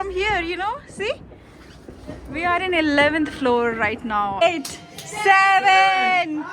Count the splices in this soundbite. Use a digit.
1